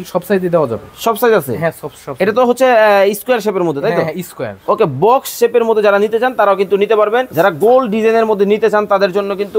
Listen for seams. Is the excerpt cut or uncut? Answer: cut